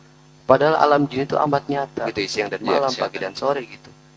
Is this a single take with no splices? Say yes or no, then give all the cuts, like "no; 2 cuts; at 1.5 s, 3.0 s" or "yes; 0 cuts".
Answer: no; 1 cut; at 2.1 s